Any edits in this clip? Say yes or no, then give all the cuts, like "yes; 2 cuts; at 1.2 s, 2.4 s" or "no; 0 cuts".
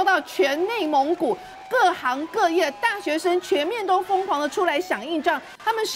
no; 0 cuts